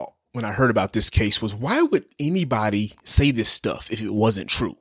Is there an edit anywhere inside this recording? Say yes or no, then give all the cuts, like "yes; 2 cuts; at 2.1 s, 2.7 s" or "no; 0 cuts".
no; 0 cuts